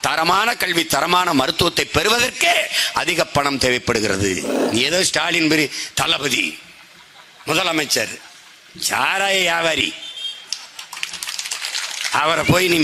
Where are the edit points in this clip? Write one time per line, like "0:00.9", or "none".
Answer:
0:04.5